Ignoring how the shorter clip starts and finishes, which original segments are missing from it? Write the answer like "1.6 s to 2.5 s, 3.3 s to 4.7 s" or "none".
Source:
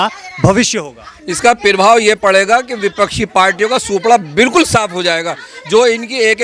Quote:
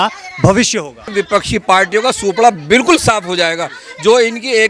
1.1 s to 2.8 s